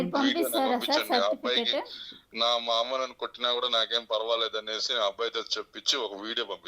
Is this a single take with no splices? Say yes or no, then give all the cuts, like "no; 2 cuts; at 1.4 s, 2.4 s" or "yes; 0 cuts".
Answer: yes; 0 cuts